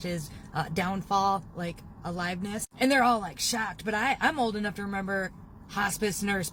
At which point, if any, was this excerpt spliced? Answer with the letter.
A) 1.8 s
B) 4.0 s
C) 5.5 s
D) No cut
D